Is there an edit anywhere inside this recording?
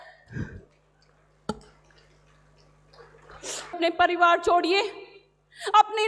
yes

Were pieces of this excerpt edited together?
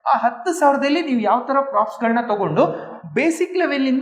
no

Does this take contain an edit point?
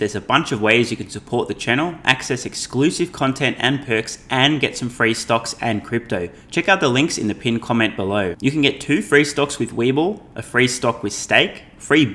no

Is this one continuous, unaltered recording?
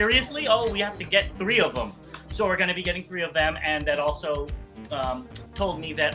yes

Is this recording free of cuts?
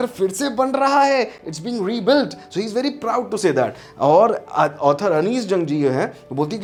yes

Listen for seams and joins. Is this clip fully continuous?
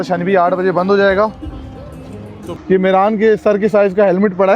no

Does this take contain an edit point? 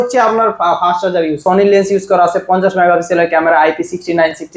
yes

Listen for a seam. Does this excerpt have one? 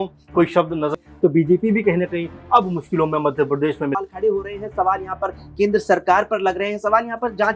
yes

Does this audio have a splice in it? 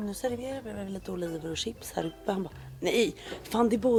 no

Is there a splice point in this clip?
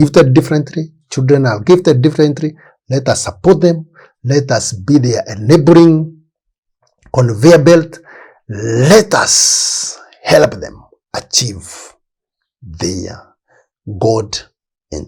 no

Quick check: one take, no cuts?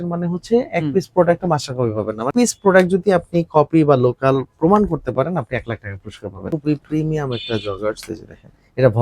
no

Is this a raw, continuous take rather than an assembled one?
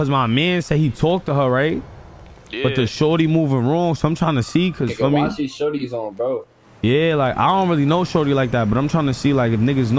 yes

